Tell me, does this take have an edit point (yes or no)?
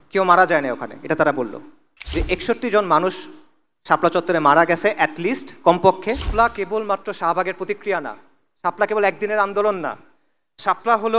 yes